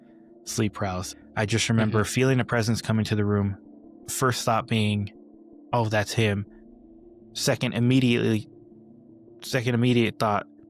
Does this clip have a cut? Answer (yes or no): yes